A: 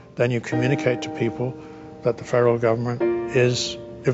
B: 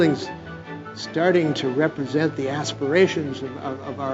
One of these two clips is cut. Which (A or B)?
A